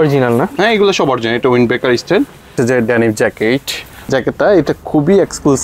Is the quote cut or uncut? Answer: cut